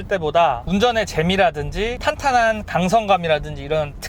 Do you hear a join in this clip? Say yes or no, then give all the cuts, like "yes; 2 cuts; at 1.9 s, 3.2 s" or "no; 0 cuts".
yes; 1 cut; at 2.0 s